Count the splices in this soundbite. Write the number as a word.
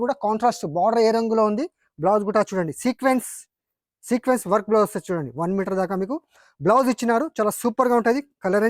zero